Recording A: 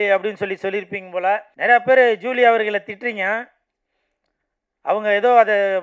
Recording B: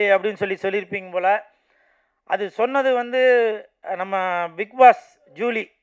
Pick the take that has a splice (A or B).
A